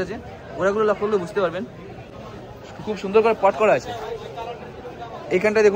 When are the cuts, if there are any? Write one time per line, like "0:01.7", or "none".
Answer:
none